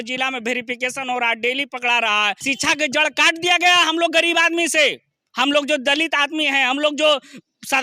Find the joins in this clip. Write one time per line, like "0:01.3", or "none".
0:02.4